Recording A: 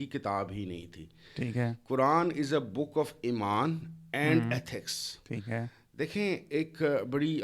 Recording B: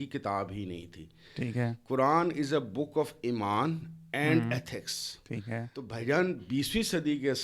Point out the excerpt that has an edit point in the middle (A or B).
B